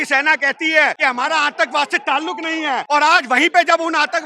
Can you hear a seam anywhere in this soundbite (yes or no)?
yes